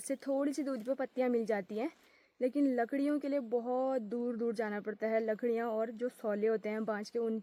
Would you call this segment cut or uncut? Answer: uncut